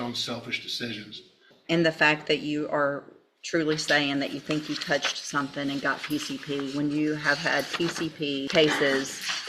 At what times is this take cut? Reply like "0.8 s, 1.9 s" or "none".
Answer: 1.5 s, 8.5 s